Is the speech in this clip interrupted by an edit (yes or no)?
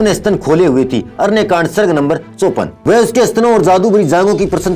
yes